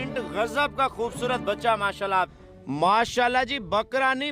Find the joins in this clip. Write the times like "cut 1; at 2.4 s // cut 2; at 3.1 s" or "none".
cut 1; at 2.3 s

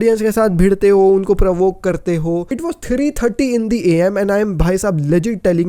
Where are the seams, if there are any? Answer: cut 1; at 2.5 s

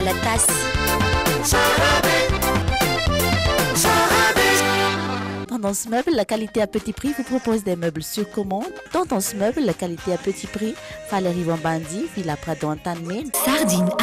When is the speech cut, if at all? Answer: cut 1; at 5.4 s // cut 2; at 13.3 s

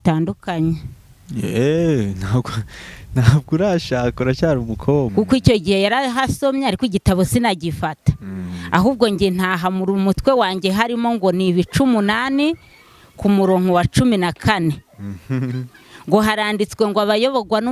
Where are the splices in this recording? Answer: cut 1; at 5.1 s

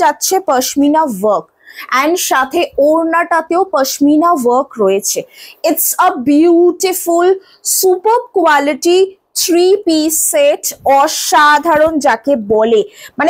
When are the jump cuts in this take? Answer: none

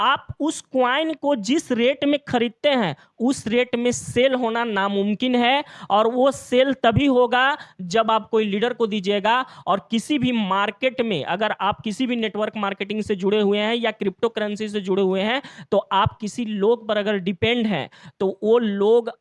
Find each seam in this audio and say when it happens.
none

